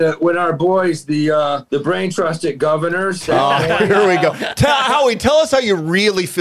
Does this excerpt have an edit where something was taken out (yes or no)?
yes